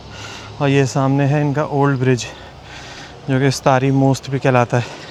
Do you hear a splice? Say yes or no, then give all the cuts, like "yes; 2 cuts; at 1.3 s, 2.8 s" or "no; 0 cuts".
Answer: no; 0 cuts